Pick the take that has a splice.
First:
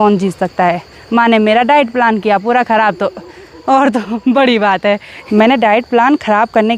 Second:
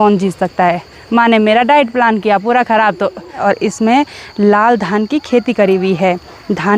second; 1 cut; at 3.4 s

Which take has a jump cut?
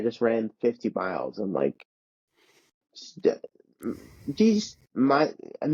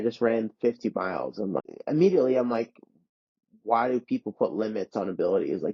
second; 1 cut; at 1.6 s

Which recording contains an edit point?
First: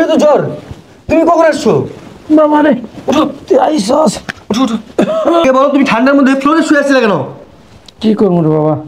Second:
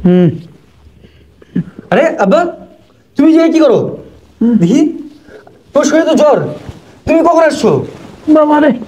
first; 1 cut; at 5.4 s

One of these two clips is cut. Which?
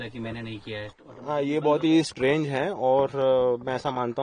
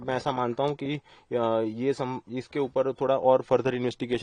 first; 1 cut; at 0.9 s

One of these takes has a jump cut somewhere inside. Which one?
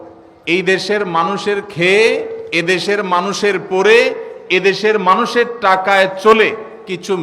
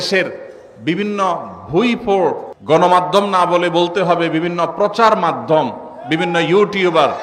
second; 1 cut; at 2.5 s

